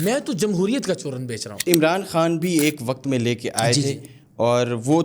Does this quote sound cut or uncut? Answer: cut